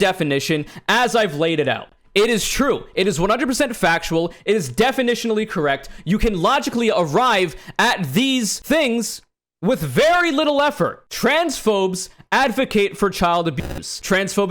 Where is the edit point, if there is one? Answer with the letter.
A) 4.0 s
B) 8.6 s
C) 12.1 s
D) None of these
B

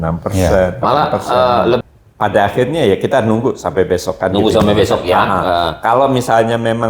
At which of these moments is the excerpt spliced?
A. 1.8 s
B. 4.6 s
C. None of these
A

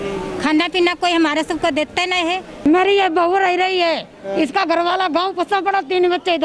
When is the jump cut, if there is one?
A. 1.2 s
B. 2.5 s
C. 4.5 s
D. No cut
B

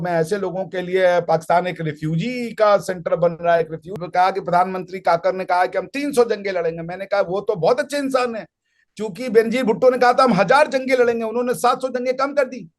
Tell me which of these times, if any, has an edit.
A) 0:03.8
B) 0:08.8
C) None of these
A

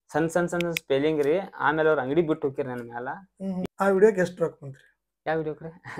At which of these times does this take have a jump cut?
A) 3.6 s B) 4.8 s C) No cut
A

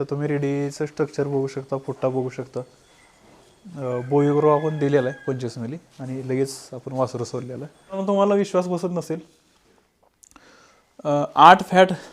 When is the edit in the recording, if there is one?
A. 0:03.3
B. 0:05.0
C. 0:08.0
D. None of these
C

